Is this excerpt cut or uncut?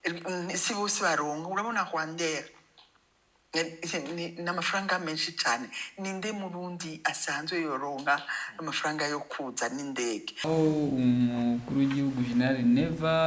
cut